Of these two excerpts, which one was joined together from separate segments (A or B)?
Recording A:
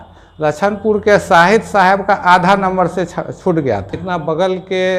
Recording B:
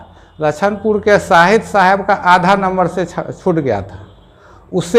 A